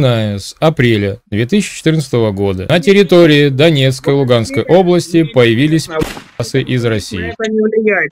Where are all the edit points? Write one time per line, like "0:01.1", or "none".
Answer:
none